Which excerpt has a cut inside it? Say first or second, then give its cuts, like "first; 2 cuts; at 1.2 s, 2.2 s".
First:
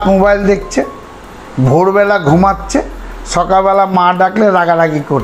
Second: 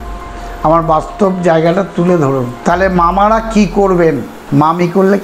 second; 2 cuts; at 2.5 s, 4.3 s